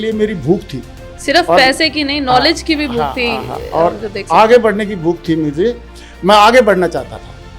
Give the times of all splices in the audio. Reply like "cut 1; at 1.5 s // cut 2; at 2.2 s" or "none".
none